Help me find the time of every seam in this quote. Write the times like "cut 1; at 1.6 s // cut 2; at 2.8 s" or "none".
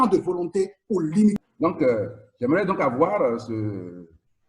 cut 1; at 1.4 s